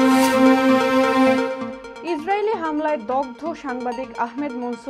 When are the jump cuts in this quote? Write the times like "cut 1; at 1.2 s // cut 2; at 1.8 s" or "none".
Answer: none